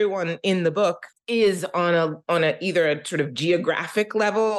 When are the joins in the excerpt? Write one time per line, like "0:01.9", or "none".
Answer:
0:01.1